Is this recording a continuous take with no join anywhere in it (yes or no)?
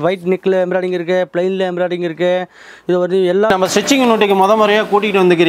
no